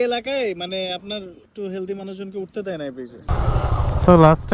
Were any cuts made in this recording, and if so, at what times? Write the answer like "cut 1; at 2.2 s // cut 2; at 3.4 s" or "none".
cut 1; at 1.5 s // cut 2; at 3.2 s